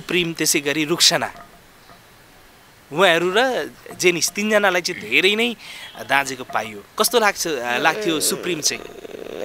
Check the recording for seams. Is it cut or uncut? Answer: cut